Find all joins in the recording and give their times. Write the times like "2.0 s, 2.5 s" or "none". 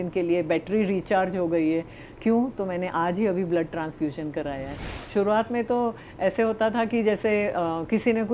5.0 s